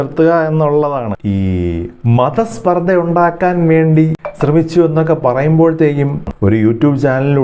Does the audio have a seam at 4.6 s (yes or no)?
no